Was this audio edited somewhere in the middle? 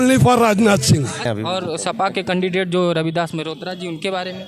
yes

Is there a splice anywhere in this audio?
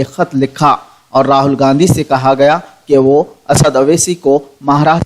yes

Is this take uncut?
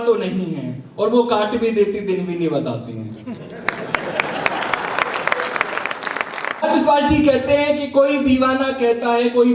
no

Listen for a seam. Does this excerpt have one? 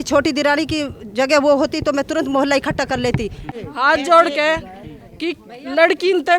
yes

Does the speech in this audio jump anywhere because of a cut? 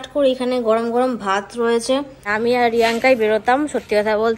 yes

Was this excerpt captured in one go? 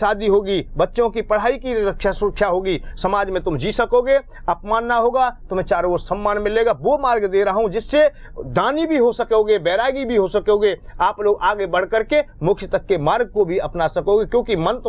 yes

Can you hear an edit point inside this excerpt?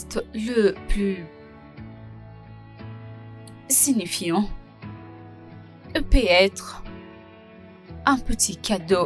yes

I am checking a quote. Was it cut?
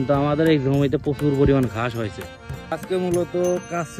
yes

